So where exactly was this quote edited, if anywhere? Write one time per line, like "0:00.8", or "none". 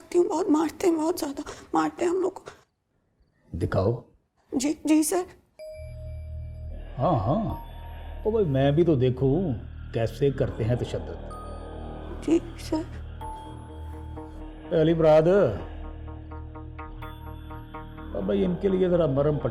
none